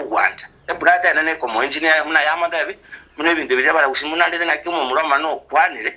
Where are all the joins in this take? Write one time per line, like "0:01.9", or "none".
none